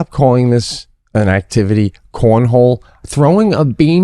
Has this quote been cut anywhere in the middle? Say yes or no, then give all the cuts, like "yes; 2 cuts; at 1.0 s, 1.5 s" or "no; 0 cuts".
yes; 1 cut; at 3.0 s